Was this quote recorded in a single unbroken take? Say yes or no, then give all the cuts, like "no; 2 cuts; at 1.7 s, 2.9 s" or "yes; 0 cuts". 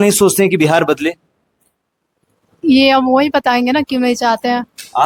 yes; 0 cuts